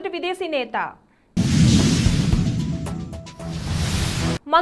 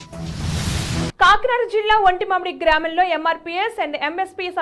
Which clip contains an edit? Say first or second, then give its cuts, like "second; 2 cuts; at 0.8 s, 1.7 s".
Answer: second; 1 cut; at 1.1 s